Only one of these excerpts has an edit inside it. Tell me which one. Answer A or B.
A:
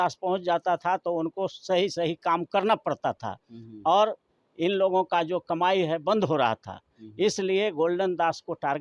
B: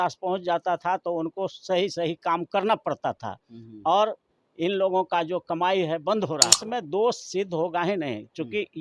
B